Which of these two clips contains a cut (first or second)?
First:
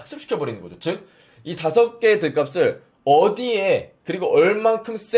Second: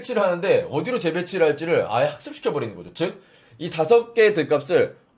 first